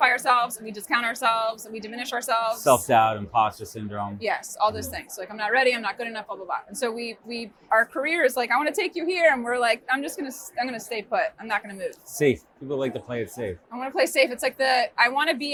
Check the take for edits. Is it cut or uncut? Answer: uncut